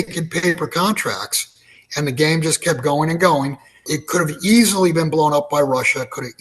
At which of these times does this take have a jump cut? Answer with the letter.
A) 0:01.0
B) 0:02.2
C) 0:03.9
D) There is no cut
C